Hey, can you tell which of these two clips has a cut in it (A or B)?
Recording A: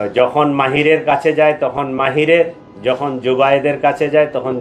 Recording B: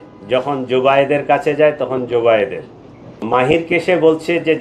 B